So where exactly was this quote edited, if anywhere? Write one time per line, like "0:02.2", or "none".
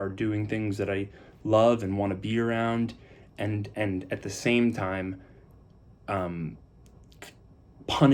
none